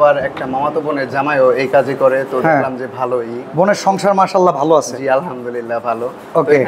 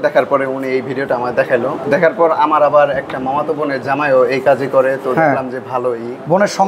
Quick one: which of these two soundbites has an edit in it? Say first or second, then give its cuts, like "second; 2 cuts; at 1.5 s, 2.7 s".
second; 1 cut; at 1.8 s